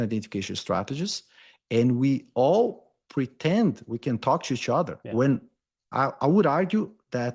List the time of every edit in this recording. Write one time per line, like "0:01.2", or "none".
none